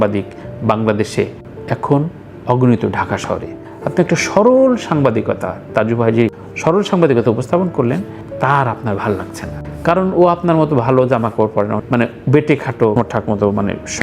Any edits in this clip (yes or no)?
yes